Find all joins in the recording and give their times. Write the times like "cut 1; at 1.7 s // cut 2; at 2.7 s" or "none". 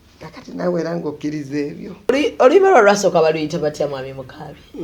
cut 1; at 2.1 s